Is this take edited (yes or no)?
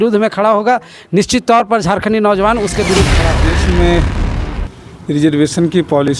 yes